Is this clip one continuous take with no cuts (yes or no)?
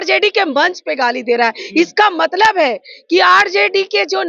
yes